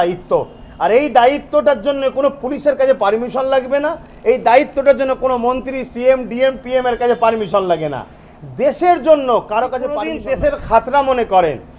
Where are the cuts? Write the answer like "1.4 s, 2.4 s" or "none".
10.0 s